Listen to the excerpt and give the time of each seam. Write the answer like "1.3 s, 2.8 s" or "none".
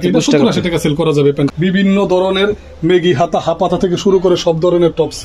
1.5 s